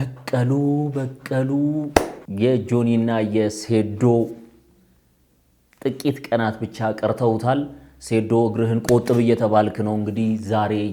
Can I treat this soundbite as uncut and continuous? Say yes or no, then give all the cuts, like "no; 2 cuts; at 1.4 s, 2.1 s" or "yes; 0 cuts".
no; 1 cut; at 2.2 s